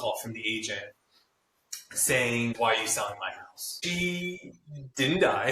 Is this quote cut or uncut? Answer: cut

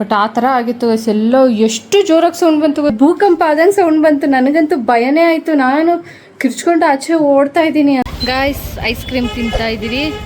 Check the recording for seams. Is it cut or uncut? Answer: cut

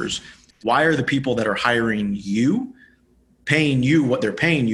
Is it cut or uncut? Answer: uncut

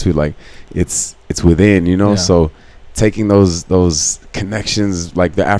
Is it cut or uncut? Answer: uncut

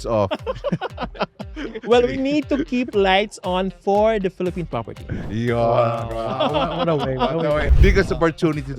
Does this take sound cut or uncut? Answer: cut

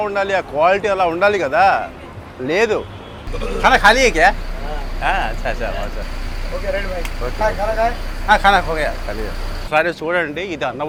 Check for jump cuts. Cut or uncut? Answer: uncut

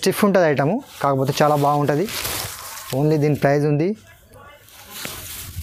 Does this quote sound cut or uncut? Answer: uncut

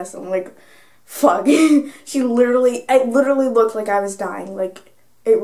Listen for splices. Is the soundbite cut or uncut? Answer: uncut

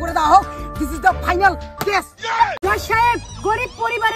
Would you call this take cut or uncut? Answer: cut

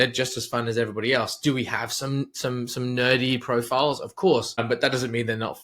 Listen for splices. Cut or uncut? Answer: cut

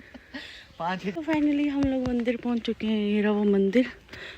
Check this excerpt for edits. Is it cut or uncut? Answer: cut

